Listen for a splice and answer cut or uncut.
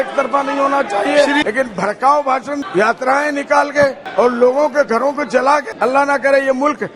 cut